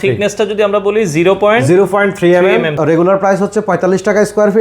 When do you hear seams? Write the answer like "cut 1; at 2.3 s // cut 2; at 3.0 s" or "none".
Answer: cut 1; at 2.8 s